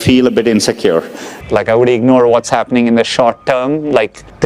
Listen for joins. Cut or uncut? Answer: cut